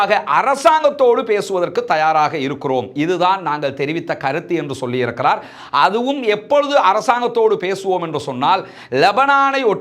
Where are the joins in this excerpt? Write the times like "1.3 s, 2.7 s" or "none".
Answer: none